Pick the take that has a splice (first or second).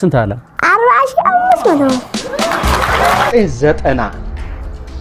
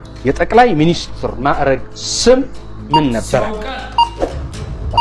first